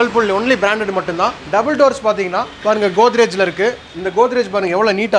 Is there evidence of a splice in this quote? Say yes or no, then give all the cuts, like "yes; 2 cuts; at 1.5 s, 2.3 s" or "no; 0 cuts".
no; 0 cuts